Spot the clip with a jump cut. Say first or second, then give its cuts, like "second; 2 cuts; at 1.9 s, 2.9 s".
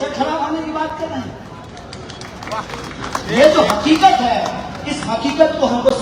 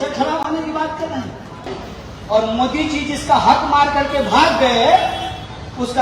second; 1 cut; at 1.8 s